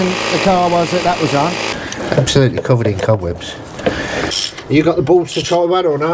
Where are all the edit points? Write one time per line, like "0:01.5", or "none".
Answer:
0:01.7
0:04.4